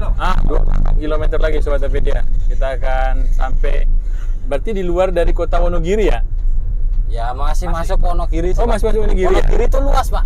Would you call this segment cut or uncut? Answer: uncut